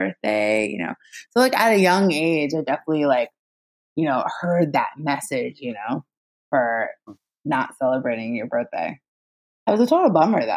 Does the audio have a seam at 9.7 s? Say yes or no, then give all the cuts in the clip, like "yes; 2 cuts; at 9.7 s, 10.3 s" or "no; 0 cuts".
yes; 1 cut; at 9.7 s